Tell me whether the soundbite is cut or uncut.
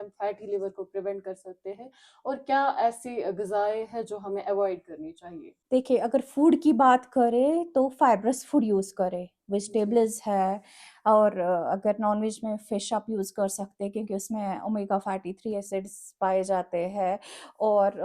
uncut